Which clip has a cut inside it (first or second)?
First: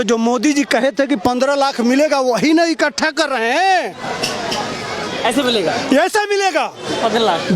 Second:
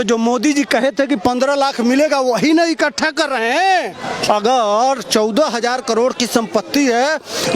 second